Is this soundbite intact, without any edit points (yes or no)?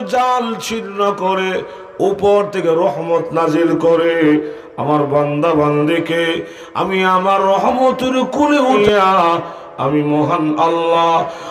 no